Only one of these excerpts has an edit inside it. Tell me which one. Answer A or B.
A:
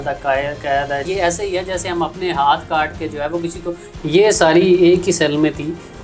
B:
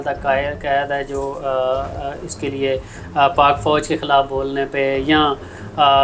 A